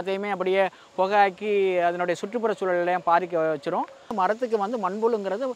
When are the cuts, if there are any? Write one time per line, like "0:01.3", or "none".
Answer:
0:04.0